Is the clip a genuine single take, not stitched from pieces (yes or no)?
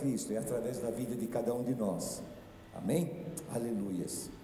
yes